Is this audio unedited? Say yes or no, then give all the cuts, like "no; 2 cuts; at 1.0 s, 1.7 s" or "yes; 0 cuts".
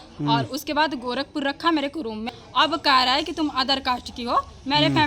no; 1 cut; at 2.3 s